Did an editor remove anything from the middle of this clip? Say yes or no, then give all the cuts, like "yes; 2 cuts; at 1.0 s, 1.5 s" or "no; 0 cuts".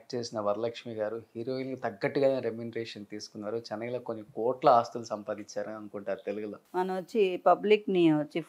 yes; 1 cut; at 6.5 s